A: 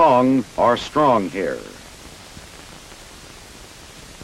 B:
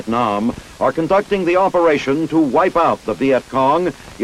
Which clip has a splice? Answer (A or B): A